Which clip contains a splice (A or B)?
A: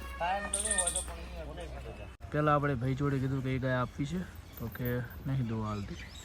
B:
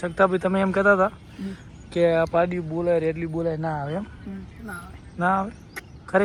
A